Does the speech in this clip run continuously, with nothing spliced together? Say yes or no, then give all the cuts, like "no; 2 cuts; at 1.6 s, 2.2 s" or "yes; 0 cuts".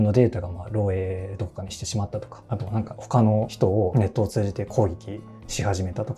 yes; 0 cuts